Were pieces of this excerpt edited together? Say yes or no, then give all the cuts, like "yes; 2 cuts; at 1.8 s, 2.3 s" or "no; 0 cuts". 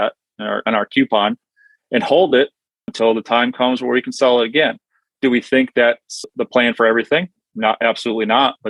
yes; 1 cut; at 6.3 s